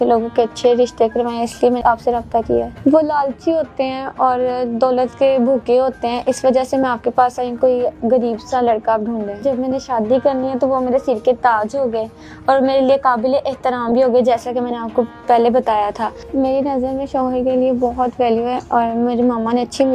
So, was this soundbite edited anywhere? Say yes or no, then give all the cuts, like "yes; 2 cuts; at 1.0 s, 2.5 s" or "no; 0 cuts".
yes; 4 cuts; at 2.7 s, 7.5 s, 9.4 s, 16.1 s